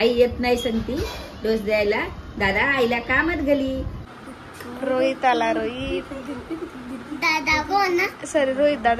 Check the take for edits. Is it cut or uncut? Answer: cut